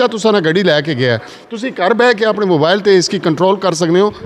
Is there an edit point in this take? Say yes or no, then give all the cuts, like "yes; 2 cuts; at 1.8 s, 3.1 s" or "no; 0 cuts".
no; 0 cuts